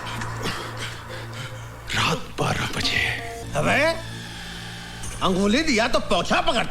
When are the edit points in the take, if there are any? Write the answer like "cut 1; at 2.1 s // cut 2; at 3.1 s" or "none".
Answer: cut 1; at 3.3 s